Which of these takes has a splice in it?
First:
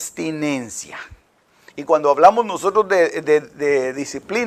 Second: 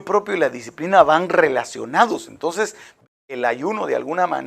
second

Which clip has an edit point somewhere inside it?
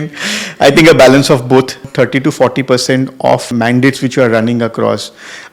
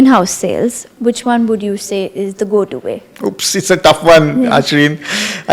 first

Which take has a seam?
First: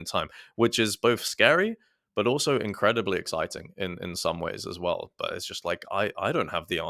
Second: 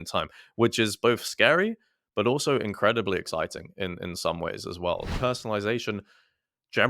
second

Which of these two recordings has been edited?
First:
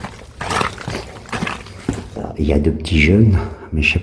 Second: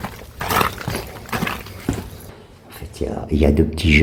first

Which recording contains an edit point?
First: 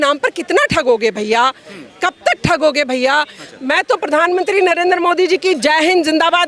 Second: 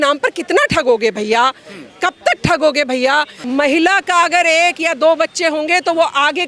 second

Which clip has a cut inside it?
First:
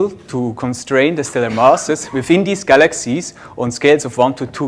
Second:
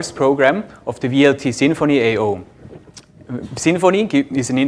first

